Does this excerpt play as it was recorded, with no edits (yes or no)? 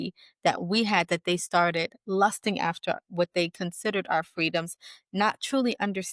yes